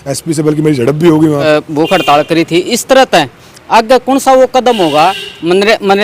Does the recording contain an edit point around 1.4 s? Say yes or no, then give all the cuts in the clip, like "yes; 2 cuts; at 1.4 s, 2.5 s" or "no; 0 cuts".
yes; 1 cut; at 1.4 s